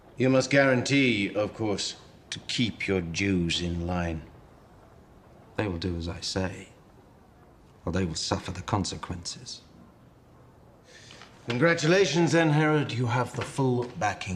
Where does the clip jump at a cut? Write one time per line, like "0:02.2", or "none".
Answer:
none